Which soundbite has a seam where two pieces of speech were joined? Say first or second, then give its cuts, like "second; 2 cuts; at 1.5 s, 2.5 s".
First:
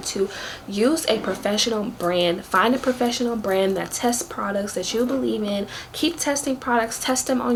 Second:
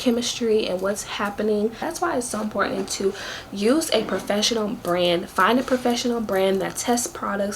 second; 1 cut; at 1.8 s